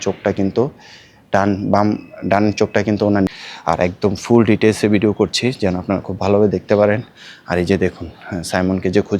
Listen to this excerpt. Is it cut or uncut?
cut